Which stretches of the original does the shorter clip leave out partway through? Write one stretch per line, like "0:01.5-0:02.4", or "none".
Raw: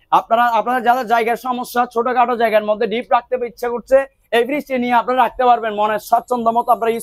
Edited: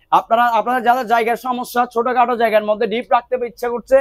none